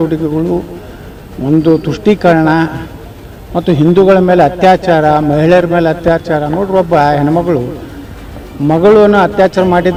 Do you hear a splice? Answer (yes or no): no